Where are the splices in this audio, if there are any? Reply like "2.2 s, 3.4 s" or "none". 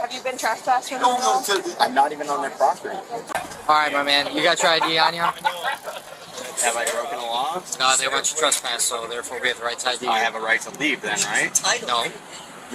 3.2 s